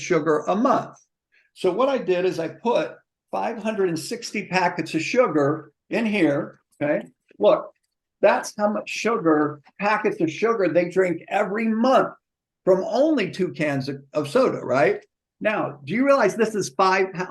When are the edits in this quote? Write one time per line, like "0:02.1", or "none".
none